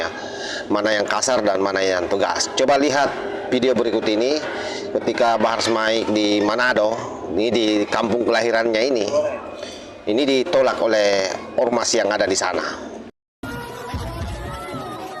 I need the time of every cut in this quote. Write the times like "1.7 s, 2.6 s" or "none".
13.4 s